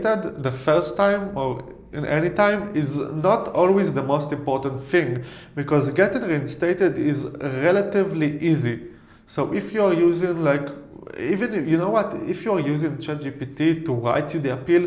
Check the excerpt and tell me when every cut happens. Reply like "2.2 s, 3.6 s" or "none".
none